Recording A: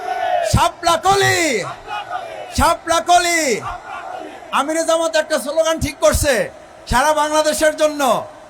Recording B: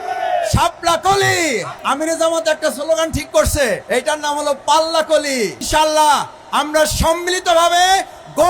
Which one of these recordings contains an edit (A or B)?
B